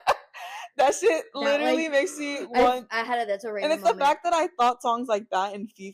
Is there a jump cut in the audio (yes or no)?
no